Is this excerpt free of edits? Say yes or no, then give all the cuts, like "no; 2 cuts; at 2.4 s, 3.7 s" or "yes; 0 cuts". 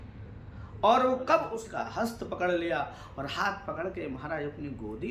no; 1 cut; at 1.6 s